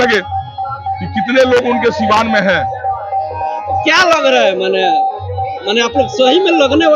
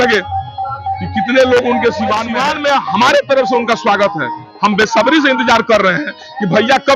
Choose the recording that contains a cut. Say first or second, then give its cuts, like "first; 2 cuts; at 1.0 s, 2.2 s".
second; 1 cut; at 2.3 s